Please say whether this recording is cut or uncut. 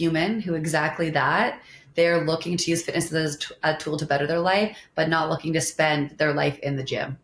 uncut